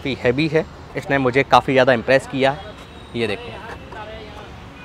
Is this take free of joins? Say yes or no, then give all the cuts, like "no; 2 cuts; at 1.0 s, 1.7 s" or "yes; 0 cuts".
no; 1 cut; at 1.0 s